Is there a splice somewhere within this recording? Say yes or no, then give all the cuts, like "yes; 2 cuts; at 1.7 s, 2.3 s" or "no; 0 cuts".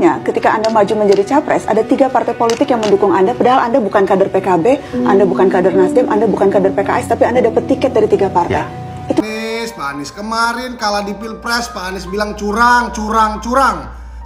yes; 1 cut; at 9.2 s